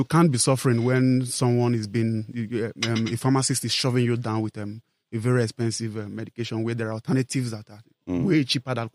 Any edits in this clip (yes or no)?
no